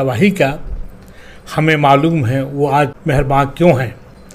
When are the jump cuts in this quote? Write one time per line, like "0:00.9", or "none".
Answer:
0:03.3